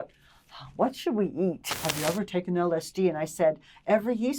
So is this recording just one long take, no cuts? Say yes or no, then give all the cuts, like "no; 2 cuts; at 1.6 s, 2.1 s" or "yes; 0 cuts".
no; 1 cut; at 1.7 s